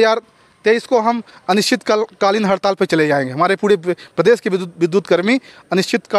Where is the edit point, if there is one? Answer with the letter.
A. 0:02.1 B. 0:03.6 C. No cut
C